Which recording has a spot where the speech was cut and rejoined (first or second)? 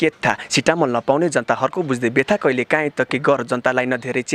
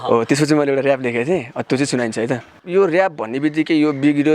second